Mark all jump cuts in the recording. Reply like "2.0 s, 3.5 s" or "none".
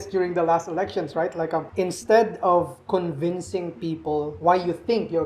1.7 s, 4.3 s